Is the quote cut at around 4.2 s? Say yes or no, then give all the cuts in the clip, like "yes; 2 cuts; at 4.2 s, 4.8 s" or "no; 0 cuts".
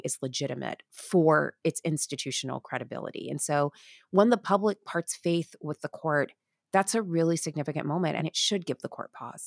no; 1 cut; at 8.2 s